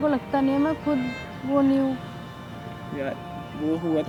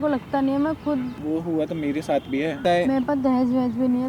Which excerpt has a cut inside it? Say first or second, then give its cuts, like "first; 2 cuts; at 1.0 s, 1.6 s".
second; 2 cuts; at 1.1 s, 2.6 s